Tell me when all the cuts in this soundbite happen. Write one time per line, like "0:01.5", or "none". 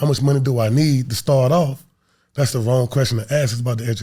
none